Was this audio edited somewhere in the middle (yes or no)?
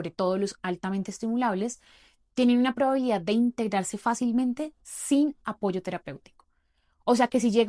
no